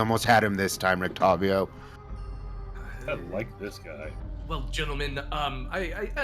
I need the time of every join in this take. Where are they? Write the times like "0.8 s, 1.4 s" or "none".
4.3 s

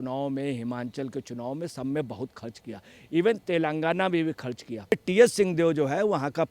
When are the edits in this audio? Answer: 4.9 s

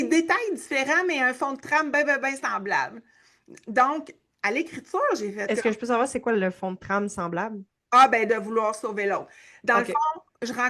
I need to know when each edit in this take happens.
none

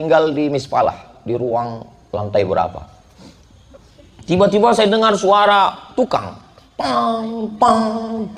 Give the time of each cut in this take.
none

